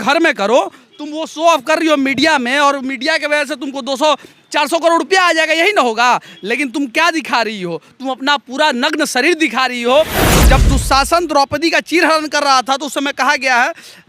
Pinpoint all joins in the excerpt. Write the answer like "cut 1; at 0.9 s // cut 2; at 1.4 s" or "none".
cut 1; at 10.3 s